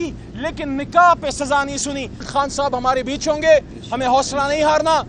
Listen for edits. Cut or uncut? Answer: cut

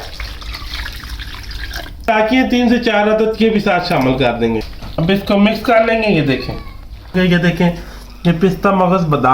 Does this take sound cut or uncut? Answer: cut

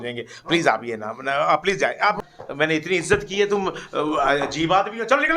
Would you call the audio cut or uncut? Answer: cut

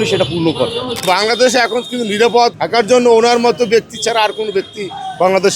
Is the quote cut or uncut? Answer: cut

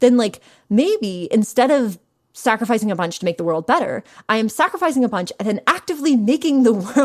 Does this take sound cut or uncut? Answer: uncut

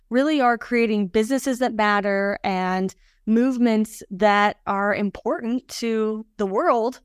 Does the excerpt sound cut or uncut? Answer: uncut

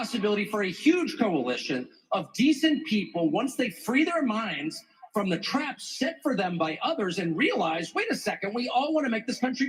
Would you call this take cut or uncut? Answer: uncut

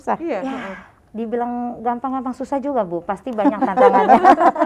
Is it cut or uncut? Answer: uncut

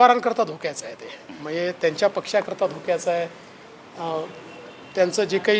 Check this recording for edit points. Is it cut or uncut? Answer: uncut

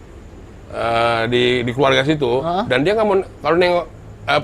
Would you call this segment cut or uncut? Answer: uncut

